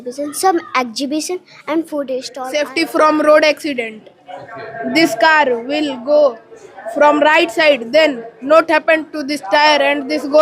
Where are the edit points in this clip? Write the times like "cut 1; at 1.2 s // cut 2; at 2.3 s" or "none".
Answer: cut 1; at 2.3 s